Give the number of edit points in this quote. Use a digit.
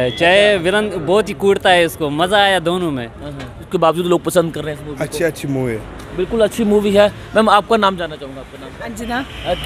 1